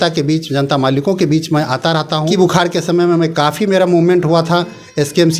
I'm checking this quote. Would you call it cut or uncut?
cut